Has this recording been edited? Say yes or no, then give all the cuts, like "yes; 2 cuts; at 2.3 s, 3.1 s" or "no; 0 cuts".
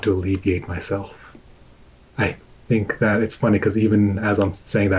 no; 0 cuts